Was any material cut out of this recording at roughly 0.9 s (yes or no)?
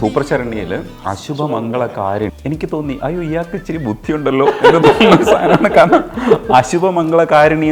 yes